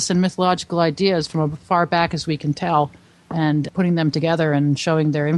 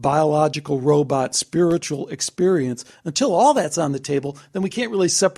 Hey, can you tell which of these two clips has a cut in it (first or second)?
first